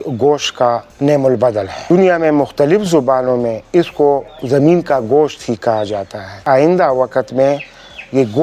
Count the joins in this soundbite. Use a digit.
2